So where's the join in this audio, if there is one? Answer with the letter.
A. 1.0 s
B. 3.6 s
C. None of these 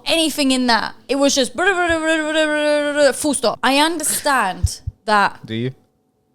B